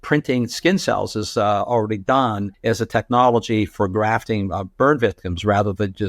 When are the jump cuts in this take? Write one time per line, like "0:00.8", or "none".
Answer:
0:02.5